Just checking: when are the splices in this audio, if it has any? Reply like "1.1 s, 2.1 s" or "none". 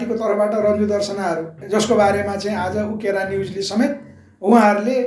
1.5 s